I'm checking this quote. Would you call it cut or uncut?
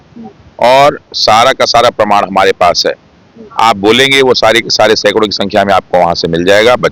uncut